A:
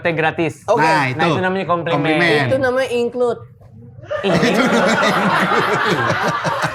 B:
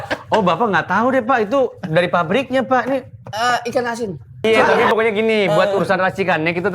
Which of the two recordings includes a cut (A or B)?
B